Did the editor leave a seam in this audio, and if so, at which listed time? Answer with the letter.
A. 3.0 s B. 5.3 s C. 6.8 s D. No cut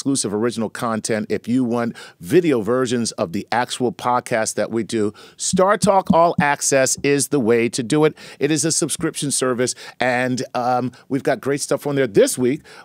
A